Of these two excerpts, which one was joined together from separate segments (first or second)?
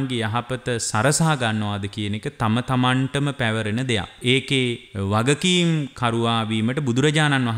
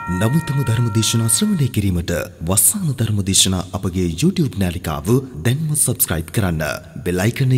first